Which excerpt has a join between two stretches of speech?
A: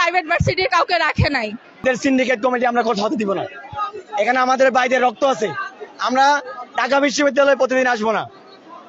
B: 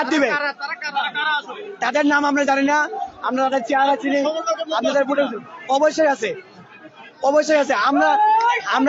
A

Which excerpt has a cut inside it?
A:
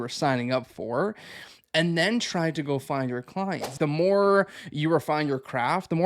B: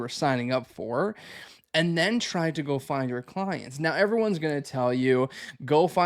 A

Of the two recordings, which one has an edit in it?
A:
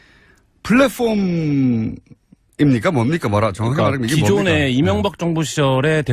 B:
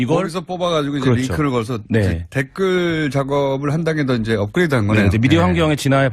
A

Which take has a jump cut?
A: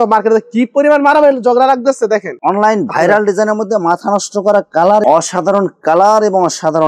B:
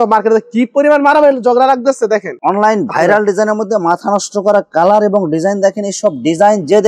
A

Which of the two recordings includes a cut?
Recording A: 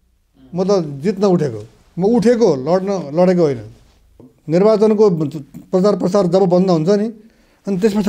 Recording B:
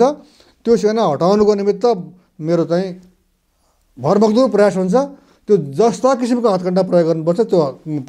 A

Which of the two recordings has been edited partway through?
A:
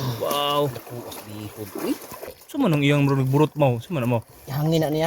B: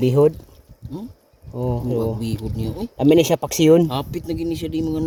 A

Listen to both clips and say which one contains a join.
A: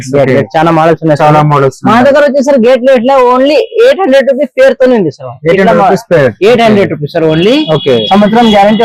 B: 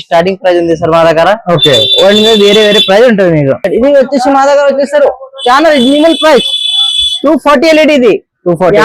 B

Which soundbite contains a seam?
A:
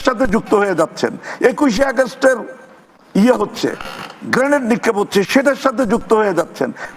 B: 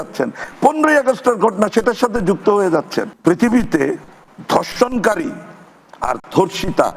B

